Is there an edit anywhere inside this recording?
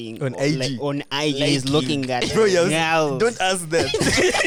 no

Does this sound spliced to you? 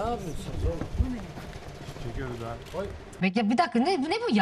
yes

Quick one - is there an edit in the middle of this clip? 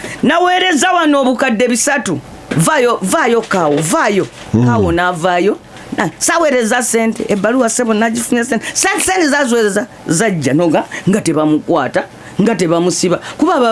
no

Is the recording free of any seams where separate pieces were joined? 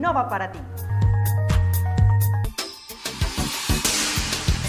no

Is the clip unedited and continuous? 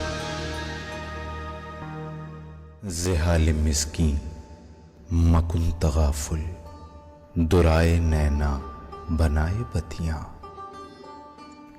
no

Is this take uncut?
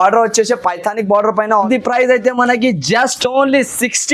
no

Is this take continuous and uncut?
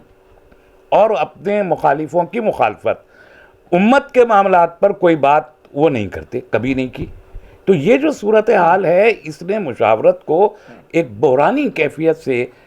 yes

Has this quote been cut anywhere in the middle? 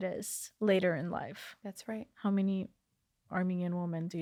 no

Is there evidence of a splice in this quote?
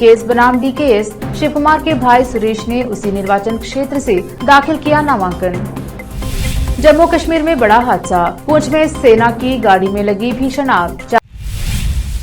yes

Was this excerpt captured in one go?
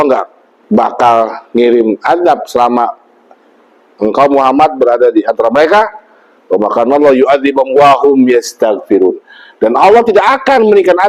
yes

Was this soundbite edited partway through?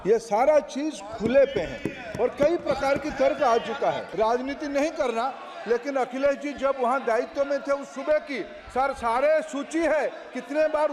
yes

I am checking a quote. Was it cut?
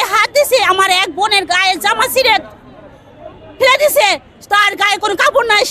no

